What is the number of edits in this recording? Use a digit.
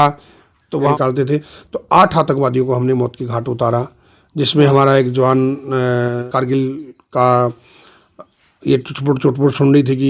2